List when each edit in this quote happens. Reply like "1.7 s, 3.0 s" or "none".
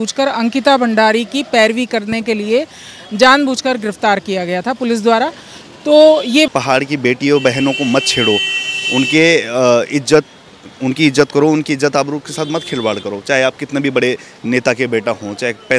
6.5 s